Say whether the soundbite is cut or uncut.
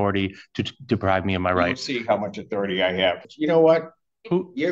cut